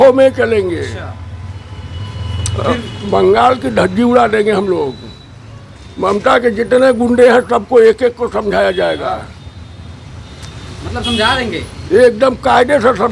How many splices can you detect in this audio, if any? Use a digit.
0